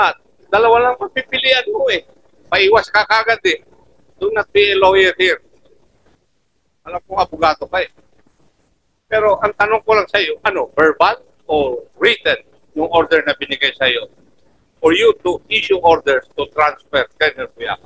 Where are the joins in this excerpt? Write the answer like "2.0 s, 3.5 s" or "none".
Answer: none